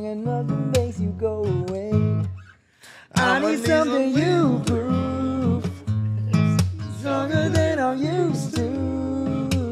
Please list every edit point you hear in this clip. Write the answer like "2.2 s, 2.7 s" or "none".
none